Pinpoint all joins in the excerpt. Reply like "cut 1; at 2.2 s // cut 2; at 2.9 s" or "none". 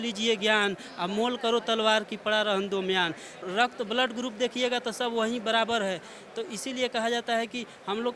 cut 1; at 3.4 s